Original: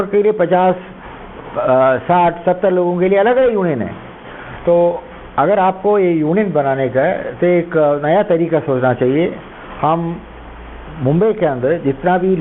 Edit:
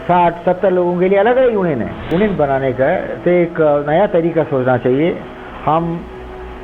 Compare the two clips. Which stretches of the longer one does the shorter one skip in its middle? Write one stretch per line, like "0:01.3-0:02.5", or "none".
0:04.1-0:06.3